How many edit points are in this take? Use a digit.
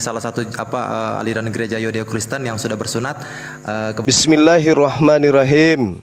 1